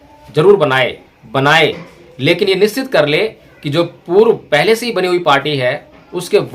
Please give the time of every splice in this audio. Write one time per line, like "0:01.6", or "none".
0:01.0